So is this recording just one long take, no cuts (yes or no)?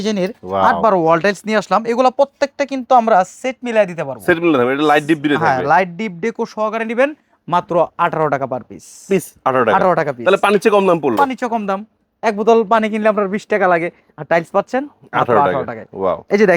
yes